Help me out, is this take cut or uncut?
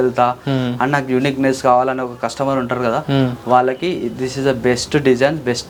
uncut